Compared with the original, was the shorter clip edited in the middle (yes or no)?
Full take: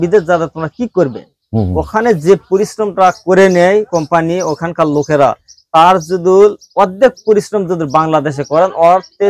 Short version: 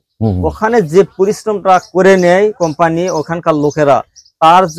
no